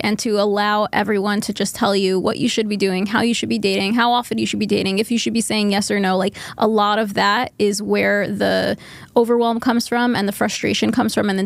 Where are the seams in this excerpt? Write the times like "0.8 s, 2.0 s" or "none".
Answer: none

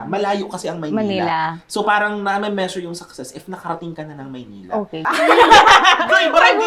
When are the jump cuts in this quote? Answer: 5.1 s

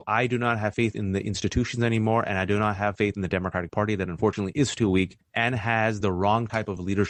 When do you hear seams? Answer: none

